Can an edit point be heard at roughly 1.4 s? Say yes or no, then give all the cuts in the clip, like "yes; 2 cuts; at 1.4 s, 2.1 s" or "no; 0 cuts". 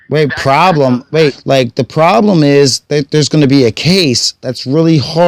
yes; 1 cut; at 1.4 s